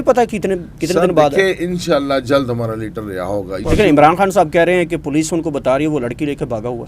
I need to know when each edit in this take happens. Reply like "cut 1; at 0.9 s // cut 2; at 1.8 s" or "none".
cut 1; at 3.6 s

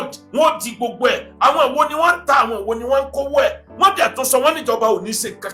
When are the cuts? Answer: none

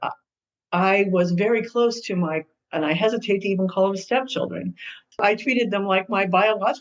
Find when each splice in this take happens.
cut 1; at 5.2 s

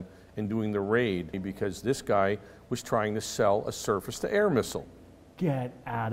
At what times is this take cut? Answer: cut 1; at 1.4 s

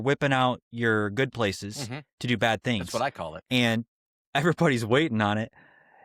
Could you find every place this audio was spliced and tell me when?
none

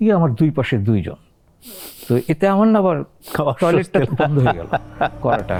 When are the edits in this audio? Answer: none

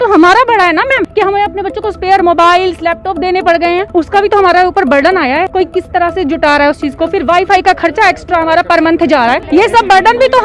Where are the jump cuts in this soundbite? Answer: none

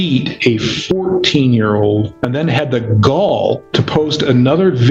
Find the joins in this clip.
cut 1; at 2.2 s // cut 2; at 3.3 s

